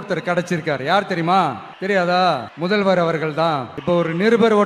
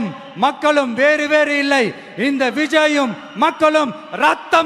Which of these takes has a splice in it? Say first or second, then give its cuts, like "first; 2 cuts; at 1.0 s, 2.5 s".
first; 3 cuts; at 1.7 s, 2.5 s, 3.7 s